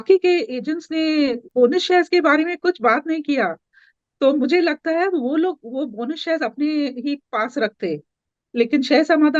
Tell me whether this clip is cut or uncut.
cut